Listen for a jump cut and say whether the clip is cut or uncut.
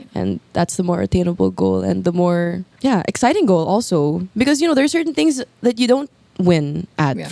uncut